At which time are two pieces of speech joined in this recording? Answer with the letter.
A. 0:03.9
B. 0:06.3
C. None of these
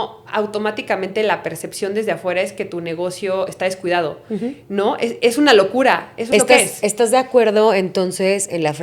B